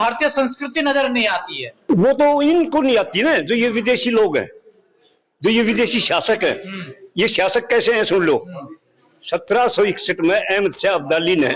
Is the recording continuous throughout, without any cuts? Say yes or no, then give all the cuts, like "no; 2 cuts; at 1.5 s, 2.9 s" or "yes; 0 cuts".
yes; 0 cuts